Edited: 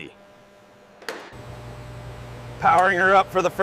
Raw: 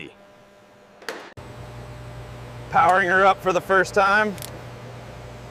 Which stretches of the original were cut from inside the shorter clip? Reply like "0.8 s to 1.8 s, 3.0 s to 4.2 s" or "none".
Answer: 1.3 s to 1.4 s